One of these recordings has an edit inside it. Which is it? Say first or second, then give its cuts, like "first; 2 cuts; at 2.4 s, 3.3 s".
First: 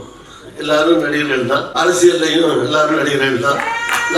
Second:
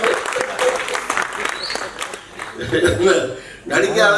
first; 1 cut; at 1.7 s